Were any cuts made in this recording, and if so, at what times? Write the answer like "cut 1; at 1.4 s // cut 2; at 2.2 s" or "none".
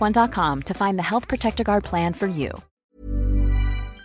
cut 1; at 2.7 s